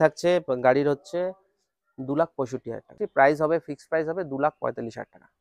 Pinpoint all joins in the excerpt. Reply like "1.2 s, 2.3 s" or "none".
3.0 s